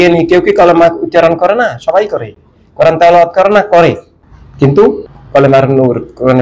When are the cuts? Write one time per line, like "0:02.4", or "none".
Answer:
0:05.1